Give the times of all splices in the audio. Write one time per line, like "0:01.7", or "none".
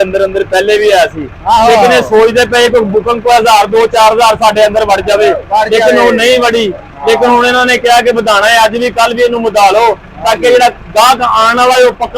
none